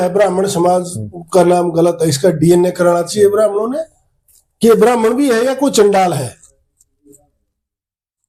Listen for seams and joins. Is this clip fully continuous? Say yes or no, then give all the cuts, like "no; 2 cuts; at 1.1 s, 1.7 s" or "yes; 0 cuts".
yes; 0 cuts